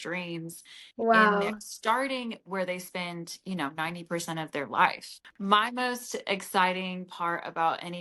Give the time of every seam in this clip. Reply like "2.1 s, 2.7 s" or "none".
5.7 s